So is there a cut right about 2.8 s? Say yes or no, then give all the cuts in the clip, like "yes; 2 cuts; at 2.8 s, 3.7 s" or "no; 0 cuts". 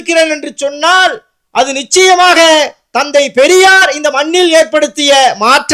no; 0 cuts